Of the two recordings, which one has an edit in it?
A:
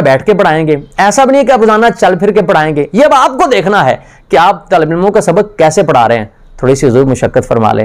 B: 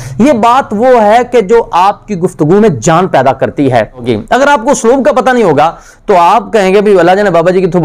B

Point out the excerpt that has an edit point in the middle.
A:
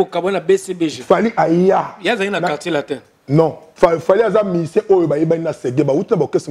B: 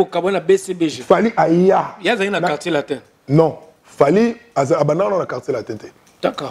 A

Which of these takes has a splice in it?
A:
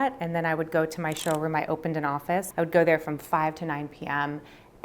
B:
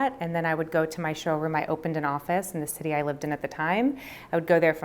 A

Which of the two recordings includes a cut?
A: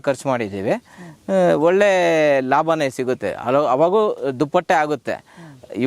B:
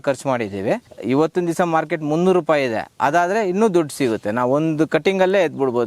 B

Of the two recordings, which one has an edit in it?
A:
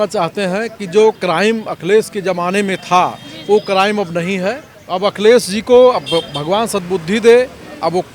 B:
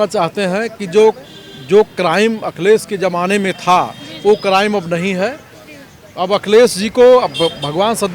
A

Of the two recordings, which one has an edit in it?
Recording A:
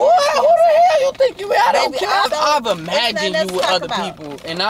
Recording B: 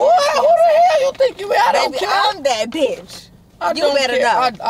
A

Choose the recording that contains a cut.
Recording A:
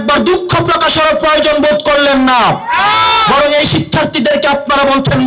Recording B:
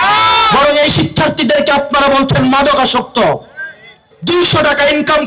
B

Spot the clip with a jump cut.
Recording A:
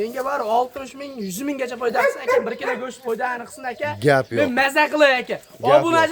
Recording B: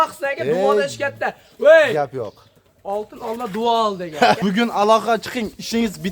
B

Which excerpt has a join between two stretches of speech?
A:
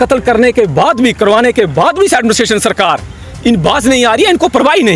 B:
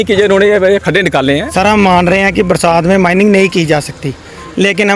B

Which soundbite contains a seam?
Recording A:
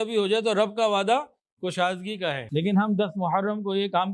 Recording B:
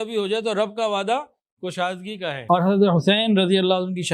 B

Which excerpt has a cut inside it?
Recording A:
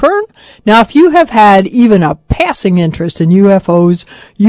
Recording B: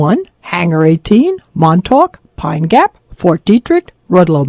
B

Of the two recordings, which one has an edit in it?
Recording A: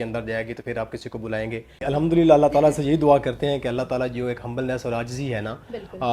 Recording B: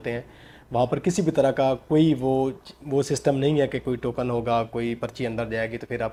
A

